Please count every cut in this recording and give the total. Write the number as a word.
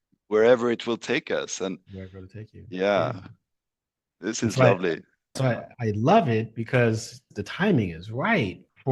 two